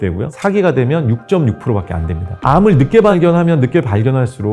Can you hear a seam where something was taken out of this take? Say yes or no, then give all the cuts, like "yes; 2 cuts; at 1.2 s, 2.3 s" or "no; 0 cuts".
yes; 1 cut; at 3.1 s